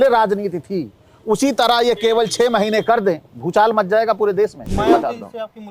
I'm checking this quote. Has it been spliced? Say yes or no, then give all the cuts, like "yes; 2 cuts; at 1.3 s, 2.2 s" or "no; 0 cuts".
yes; 2 cuts; at 3.3 s, 4.7 s